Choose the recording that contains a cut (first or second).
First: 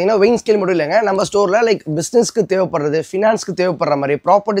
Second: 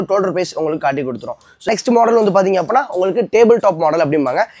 second